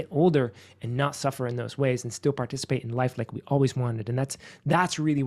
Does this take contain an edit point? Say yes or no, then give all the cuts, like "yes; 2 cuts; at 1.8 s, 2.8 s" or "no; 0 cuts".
no; 0 cuts